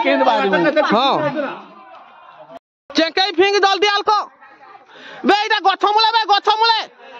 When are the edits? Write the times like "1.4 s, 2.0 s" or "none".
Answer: 2.5 s